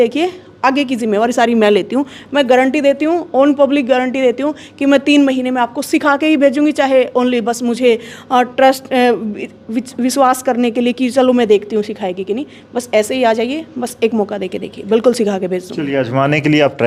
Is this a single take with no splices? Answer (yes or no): yes